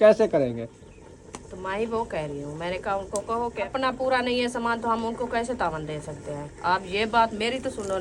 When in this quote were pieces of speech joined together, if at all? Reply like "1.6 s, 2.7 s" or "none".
3.7 s, 6.5 s